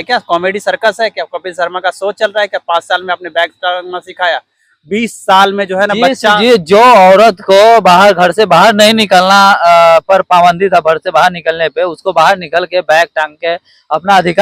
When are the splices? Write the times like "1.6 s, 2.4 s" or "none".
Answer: none